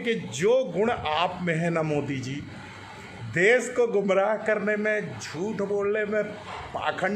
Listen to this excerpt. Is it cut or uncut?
cut